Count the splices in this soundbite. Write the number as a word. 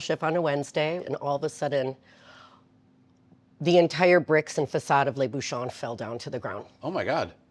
one